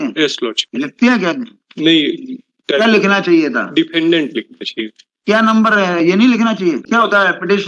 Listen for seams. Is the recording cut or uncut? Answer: uncut